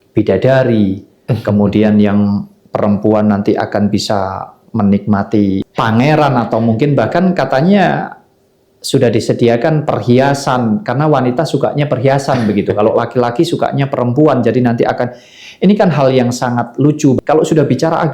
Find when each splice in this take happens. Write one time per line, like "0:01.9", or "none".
0:05.7
0:17.2